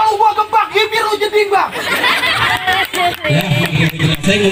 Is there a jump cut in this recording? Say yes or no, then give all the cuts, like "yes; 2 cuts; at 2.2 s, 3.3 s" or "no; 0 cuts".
no; 0 cuts